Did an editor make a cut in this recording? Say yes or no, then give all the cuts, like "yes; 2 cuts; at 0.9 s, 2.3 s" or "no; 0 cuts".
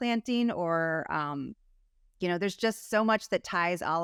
no; 0 cuts